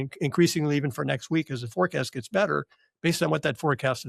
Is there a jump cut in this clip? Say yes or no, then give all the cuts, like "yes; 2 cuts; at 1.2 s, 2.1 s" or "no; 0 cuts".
no; 0 cuts